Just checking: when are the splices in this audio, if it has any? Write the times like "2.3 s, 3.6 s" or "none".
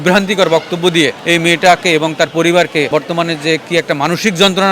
1.2 s, 2.9 s